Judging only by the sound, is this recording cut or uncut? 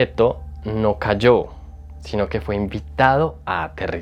uncut